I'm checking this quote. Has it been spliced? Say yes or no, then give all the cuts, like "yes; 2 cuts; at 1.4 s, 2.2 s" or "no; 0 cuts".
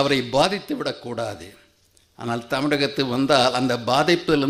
no; 0 cuts